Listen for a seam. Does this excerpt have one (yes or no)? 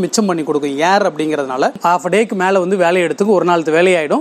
yes